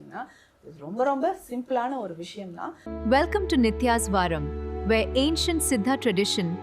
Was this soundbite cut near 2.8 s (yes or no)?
yes